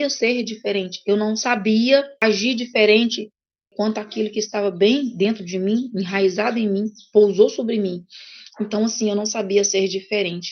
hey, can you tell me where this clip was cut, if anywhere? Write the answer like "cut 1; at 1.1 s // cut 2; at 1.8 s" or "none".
cut 1; at 2.2 s // cut 2; at 3.7 s